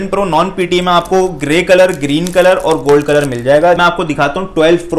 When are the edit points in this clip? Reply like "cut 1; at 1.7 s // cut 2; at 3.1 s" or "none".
cut 1; at 3.8 s